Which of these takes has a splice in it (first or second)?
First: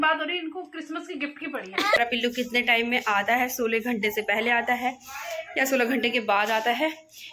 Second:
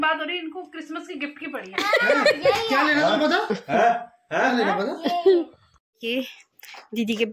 first